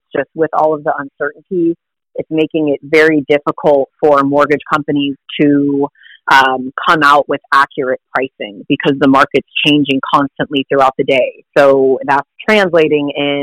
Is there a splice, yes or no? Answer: yes